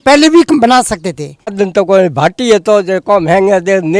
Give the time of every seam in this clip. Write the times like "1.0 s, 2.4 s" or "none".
1.5 s